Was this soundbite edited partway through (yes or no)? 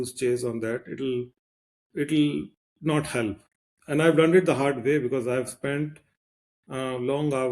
yes